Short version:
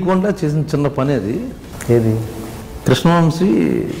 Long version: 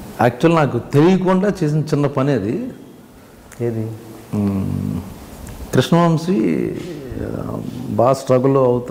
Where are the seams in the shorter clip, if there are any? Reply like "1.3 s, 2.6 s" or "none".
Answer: 1.7 s, 2.4 s